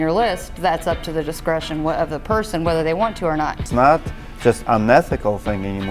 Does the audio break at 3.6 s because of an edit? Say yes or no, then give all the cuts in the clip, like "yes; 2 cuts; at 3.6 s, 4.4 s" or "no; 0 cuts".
yes; 1 cut; at 3.6 s